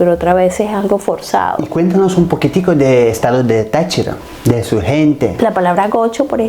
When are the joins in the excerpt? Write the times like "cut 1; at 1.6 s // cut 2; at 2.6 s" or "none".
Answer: cut 1; at 1.7 s // cut 2; at 5.3 s